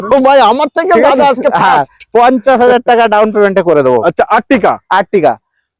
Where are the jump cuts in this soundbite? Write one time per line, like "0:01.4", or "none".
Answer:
none